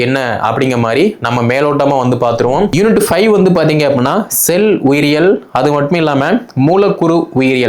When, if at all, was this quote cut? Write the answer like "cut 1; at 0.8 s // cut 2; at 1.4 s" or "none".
cut 1; at 2.7 s